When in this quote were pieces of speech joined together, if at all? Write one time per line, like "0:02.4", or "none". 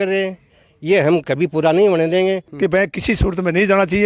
0:02.5

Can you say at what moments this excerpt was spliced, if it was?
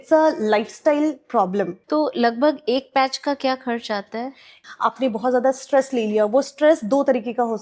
0:01.8
0:04.5

